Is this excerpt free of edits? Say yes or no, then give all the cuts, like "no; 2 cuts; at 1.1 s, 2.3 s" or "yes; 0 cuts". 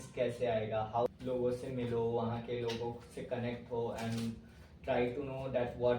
no; 1 cut; at 1.1 s